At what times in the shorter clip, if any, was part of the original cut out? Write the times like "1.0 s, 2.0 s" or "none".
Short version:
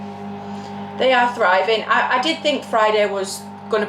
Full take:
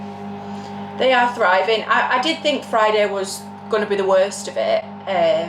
none